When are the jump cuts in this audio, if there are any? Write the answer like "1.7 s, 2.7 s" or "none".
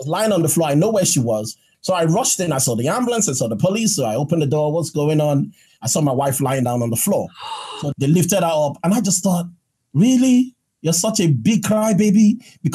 1.6 s, 5.7 s, 7.8 s